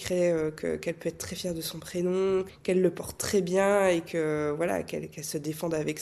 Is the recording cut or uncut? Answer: uncut